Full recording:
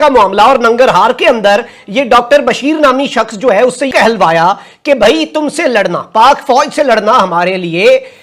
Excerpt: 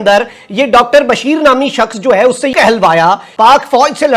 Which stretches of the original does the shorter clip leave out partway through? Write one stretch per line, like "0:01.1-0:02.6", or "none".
0:04.6-0:06.0